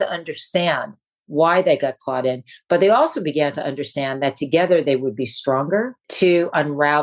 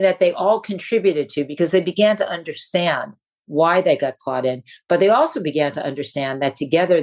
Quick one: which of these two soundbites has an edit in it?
first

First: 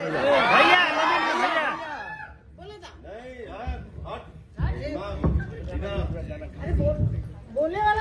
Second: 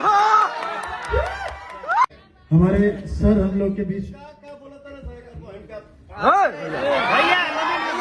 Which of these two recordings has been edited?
second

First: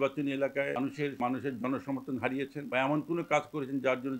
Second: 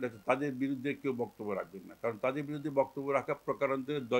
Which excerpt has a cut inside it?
first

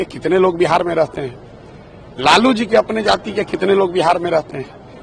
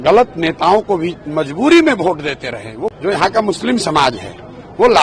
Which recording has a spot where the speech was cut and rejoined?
second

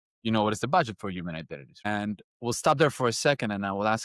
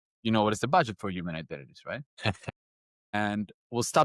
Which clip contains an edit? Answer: first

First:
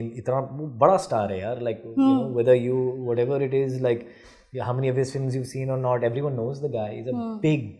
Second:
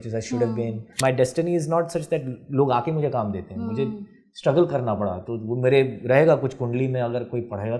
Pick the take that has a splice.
second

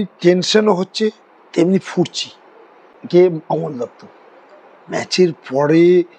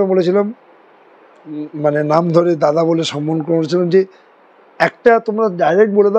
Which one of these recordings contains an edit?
first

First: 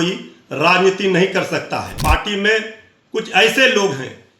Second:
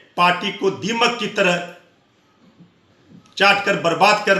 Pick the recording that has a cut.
first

